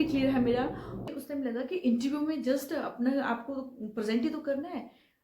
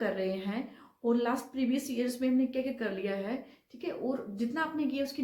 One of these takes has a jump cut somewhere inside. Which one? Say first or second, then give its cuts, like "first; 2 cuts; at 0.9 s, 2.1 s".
first; 1 cut; at 1.1 s